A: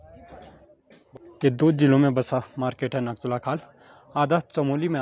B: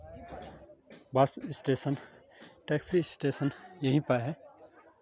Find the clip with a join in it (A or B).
A